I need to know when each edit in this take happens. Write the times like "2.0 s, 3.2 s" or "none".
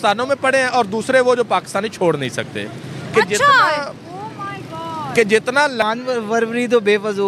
5.8 s